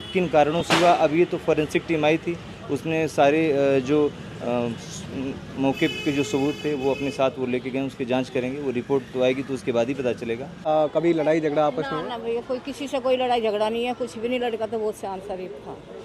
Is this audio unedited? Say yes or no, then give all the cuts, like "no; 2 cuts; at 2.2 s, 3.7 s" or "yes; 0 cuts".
no; 1 cut; at 10.6 s